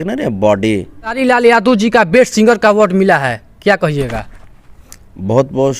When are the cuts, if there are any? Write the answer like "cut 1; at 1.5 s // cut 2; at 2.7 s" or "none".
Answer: cut 1; at 1.2 s